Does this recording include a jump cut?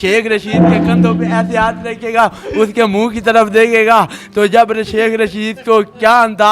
no; 0 cuts

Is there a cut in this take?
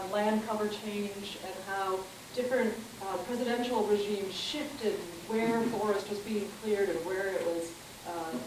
yes; 1 cut; at 2.6 s

